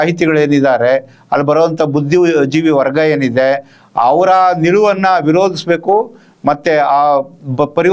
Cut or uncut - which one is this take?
uncut